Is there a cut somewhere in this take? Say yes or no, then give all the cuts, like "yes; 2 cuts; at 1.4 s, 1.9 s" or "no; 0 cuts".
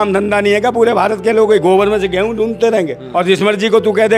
yes; 1 cut; at 3.0 s